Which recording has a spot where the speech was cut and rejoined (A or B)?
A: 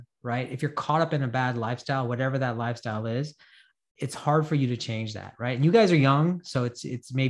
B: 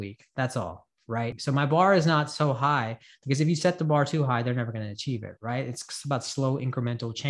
B